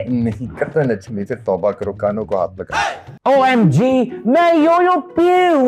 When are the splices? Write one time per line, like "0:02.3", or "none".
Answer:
0:03.0